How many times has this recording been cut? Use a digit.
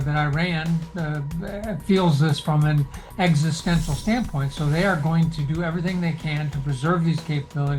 0